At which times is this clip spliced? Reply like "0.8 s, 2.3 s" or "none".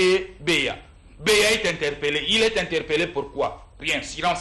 none